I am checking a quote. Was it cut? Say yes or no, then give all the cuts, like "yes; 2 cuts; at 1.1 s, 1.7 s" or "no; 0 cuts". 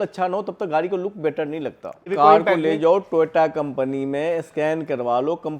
yes; 1 cut; at 2.1 s